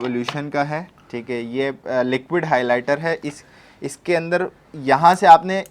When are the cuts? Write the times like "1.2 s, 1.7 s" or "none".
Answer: none